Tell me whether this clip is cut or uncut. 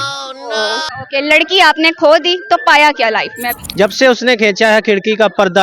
cut